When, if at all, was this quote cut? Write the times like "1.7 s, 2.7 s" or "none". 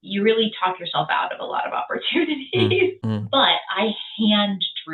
3.0 s